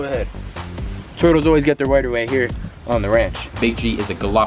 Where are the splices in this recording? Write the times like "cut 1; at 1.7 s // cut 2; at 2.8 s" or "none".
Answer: cut 1; at 3.5 s